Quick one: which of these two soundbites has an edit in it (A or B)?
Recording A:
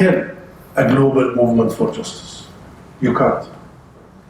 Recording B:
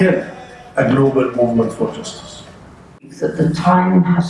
B